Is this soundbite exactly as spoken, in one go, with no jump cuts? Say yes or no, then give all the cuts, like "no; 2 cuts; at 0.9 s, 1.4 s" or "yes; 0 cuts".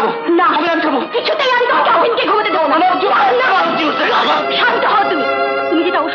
yes; 0 cuts